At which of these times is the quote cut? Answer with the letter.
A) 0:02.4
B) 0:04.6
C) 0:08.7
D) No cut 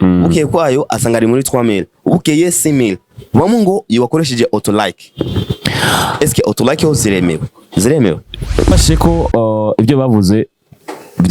C